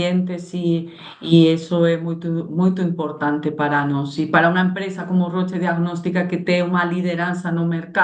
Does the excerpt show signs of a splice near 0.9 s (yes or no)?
no